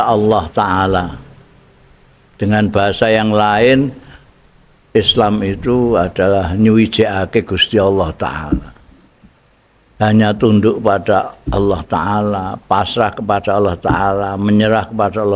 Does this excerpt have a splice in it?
no; 0 cuts

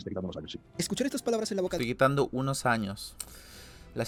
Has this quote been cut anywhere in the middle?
no; 0 cuts

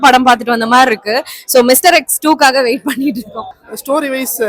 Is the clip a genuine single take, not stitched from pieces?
no; 1 cut; at 3.3 s

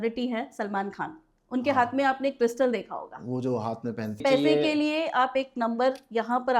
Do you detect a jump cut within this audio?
yes; 1 cut; at 4.2 s

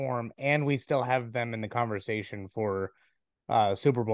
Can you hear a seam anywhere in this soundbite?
no; 0 cuts

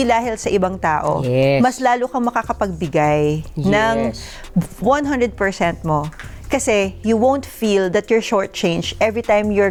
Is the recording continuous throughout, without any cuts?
yes; 0 cuts

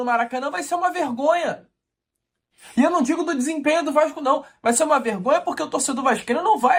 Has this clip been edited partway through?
no; 0 cuts

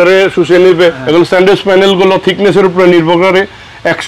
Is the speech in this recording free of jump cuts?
no; 1 cut; at 1.0 s

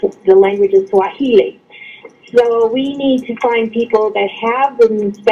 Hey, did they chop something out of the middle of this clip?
yes; 1 cut; at 3.5 s

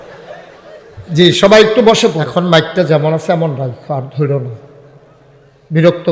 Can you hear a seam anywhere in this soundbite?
yes; 1 cut; at 2.2 s

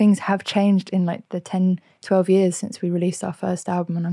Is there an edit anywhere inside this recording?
no; 0 cuts

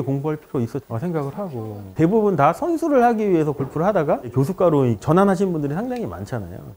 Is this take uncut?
no; 1 cut; at 1.9 s

